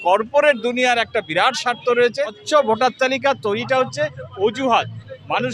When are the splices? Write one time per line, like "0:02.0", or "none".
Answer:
0:02.4